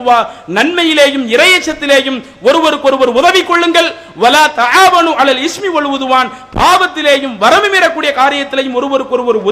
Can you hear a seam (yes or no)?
no